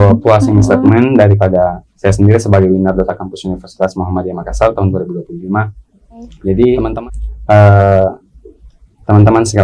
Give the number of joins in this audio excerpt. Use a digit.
1